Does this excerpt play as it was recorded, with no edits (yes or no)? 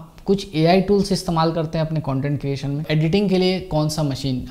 no